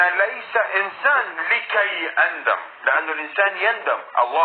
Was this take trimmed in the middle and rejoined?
no; 0 cuts

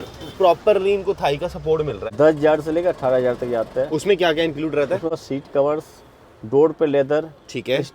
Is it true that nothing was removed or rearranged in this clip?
no; 2 cuts; at 2.0 s, 5.2 s

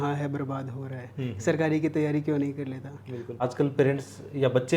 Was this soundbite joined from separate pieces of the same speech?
yes; 1 cut; at 3.4 s

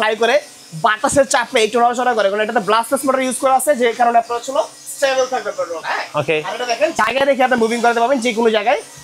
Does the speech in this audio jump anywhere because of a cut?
no; 0 cuts

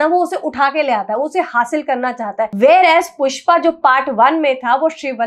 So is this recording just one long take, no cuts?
no; 1 cut; at 2.5 s

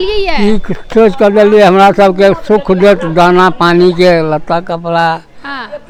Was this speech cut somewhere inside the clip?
no; 0 cuts

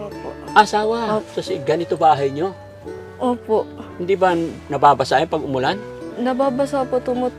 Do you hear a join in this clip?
yes; 2 cuts; at 1.3 s, 6.0 s

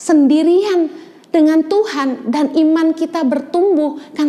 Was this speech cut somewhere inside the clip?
no; 0 cuts

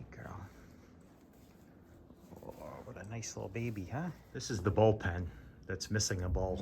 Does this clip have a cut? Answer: yes; 1 cut; at 4.3 s

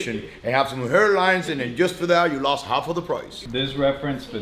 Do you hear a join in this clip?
yes; 1 cut; at 3.4 s

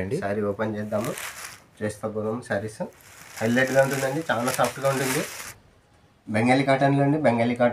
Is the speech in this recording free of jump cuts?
no; 1 cut; at 5.4 s

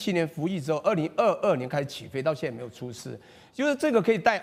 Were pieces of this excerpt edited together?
no; 0 cuts

